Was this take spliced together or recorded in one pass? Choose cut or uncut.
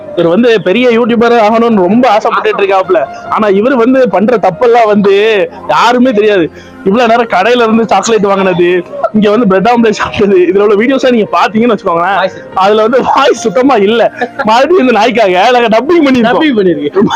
uncut